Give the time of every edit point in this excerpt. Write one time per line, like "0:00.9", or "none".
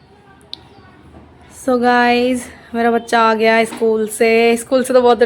none